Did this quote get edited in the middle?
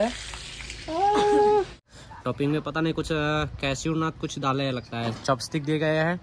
yes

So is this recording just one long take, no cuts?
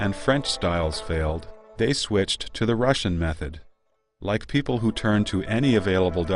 yes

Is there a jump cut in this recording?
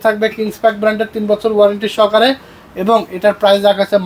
no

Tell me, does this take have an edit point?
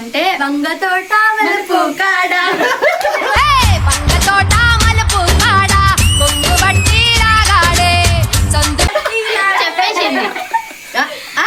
no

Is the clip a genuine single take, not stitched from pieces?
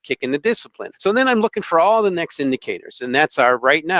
yes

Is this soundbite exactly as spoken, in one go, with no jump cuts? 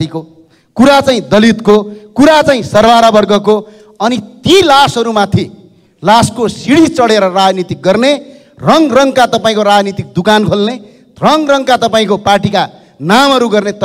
yes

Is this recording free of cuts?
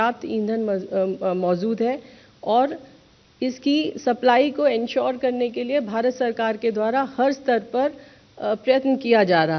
yes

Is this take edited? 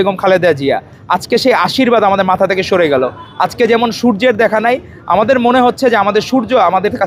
no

